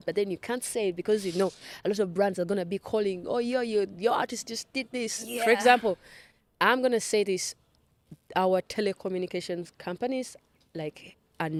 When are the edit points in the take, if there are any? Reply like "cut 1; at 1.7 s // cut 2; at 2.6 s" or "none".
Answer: none

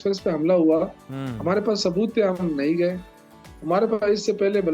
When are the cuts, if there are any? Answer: none

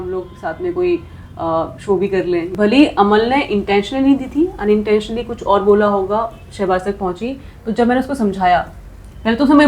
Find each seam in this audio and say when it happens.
cut 1; at 2.5 s

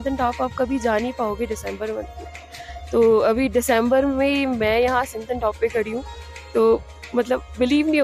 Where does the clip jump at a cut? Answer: none

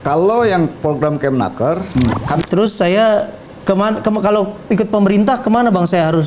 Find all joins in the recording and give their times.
cut 1; at 1.9 s

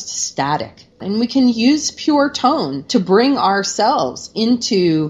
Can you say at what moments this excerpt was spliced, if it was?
cut 1; at 1.0 s

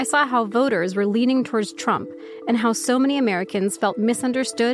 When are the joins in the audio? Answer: none

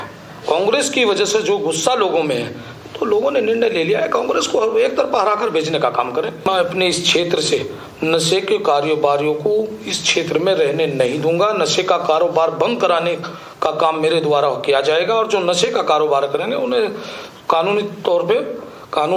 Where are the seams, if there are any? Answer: cut 1; at 6.4 s

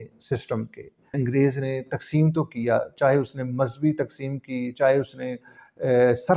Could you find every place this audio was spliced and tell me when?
cut 1; at 1.2 s

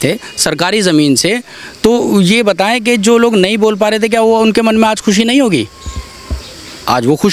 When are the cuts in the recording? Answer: none

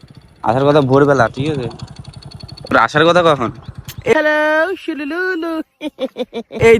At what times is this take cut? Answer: none

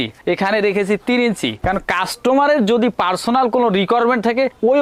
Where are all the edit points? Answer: none

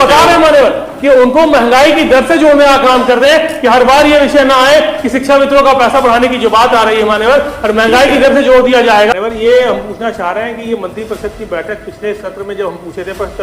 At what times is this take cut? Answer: cut 1; at 9.1 s

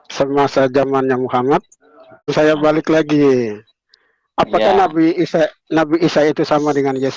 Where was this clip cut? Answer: cut 1; at 2.3 s

